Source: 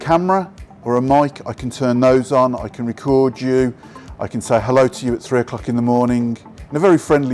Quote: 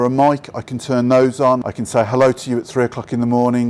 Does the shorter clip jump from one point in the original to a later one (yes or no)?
yes